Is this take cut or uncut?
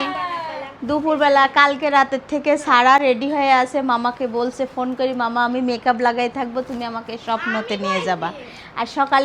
uncut